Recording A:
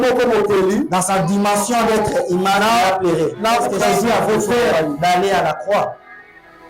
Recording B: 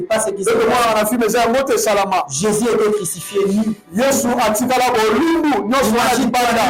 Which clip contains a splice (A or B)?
A